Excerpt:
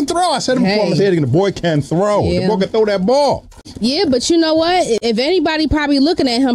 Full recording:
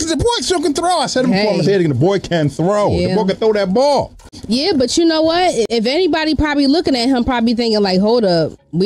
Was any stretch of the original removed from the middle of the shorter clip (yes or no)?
no